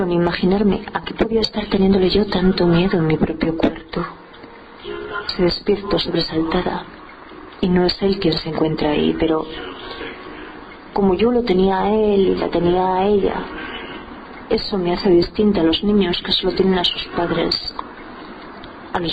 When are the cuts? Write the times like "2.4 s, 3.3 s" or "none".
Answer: none